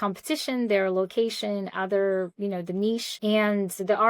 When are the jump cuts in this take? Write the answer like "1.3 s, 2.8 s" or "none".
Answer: 3.1 s